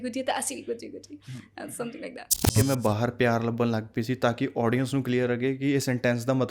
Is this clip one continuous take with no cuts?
no; 1 cut; at 2.4 s

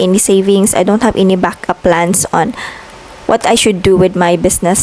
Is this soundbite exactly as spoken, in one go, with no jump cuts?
yes; 0 cuts

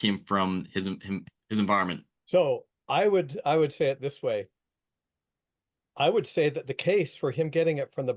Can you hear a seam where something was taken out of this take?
yes; 1 cut; at 2.1 s

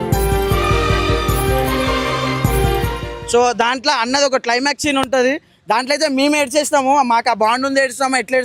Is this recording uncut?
no; 1 cut; at 3.1 s

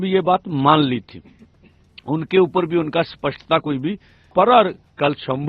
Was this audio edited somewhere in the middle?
yes; 1 cut; at 4.3 s

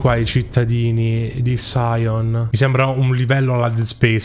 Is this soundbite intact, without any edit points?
no; 1 cut; at 2.5 s

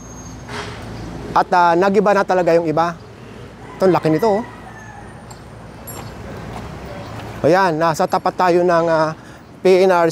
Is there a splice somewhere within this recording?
no; 0 cuts

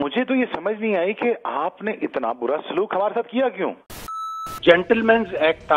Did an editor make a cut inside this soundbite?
yes; 1 cut; at 4.4 s

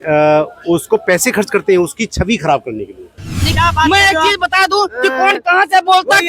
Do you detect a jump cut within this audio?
yes; 1 cut; at 3.5 s

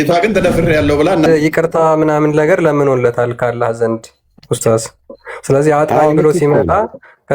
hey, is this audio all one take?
no; 1 cut; at 1.3 s

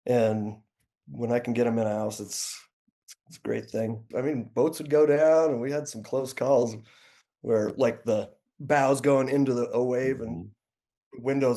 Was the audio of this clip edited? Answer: yes; 1 cut; at 4.1 s

